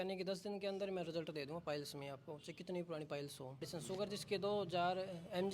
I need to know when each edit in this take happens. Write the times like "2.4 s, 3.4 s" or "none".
3.7 s